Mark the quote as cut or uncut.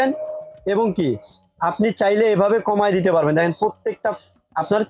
uncut